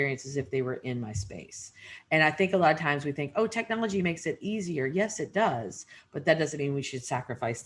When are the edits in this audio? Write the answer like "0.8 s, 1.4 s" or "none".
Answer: none